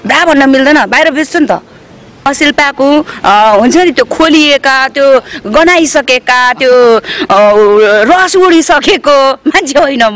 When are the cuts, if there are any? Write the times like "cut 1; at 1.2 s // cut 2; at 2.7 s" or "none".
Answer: cut 1; at 2.3 s